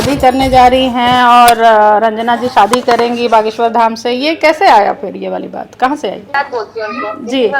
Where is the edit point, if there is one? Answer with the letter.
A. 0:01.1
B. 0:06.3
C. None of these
B